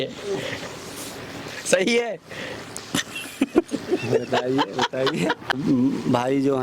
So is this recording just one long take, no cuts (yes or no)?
no